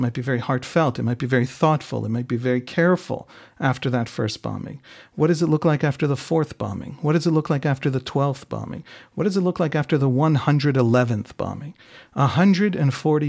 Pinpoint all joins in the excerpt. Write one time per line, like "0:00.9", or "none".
none